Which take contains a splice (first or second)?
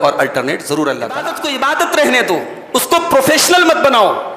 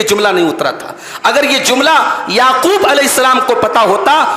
first